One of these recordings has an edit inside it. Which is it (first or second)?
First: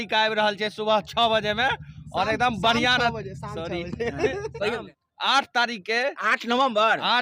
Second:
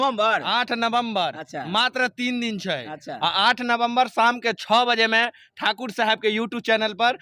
first